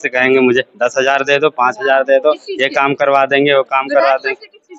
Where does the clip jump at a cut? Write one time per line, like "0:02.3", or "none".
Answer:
none